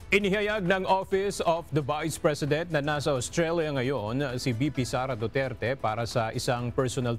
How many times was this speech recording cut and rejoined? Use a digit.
0